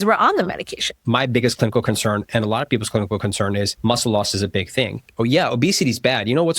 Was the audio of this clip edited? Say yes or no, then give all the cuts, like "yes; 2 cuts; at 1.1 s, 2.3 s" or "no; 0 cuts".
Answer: yes; 3 cuts; at 1.0 s, 3.7 s, 5.0 s